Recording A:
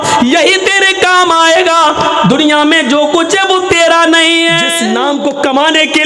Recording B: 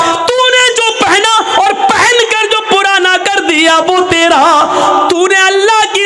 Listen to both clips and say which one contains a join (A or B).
A